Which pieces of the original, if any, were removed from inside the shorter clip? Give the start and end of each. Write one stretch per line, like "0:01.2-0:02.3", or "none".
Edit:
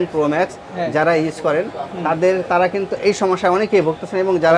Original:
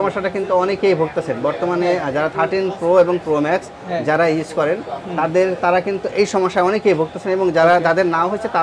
none